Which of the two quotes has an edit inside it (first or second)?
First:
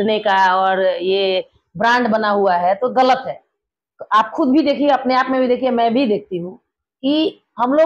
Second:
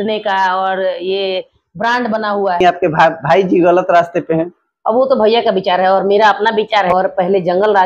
second